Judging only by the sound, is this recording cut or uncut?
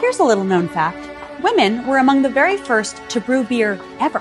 cut